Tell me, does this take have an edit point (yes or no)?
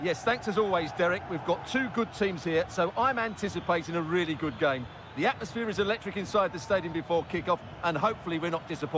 no